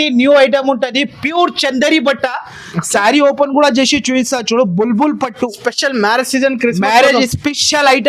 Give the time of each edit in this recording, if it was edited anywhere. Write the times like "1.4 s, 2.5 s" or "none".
none

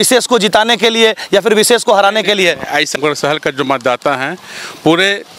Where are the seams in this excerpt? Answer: 3.0 s

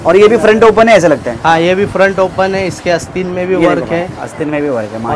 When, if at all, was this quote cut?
none

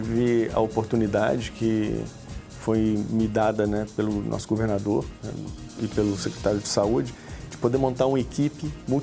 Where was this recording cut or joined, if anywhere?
none

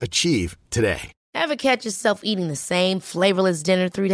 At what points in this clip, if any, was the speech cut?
1.1 s

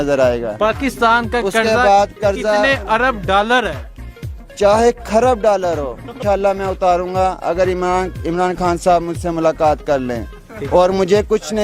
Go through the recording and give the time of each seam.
6.1 s

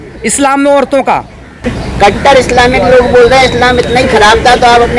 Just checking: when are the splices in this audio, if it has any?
none

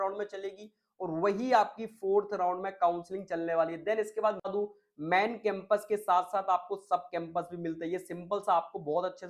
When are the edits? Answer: 4.5 s

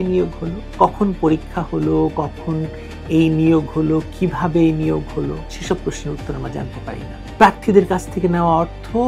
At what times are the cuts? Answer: 7.2 s

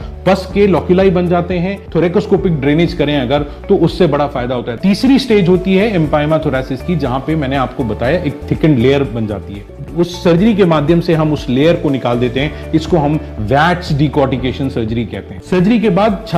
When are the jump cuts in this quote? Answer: 1.8 s, 4.7 s, 9.8 s, 15.3 s

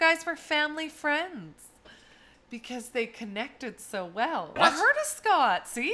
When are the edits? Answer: 4.6 s

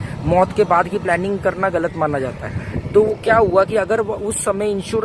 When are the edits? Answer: none

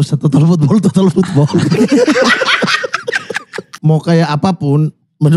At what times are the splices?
3.8 s

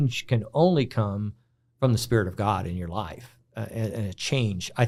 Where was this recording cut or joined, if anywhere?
none

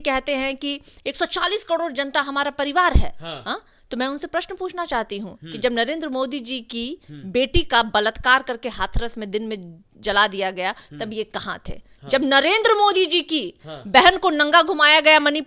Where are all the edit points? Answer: none

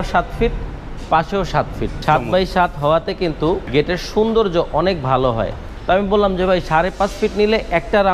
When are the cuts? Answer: 1.9 s, 3.7 s, 5.7 s

